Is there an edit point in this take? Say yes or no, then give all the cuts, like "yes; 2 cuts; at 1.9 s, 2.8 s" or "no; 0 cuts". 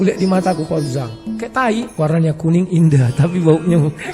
yes; 1 cut; at 1.9 s